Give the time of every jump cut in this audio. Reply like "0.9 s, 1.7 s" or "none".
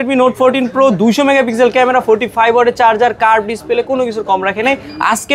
none